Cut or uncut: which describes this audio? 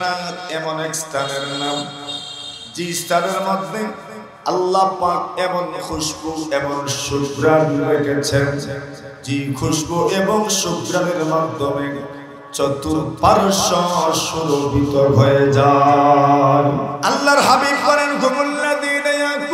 cut